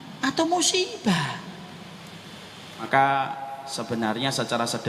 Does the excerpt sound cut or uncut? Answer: cut